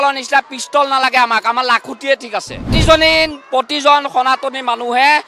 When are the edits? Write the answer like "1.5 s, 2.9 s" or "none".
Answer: 2.8 s

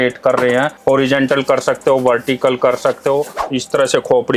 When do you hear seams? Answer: 3.5 s

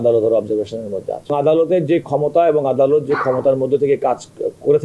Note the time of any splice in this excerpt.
1.3 s

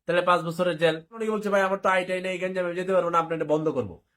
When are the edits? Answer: 1.2 s

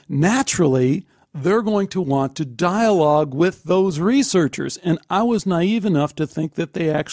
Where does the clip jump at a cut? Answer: none

